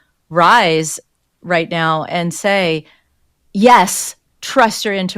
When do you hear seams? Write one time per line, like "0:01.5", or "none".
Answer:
none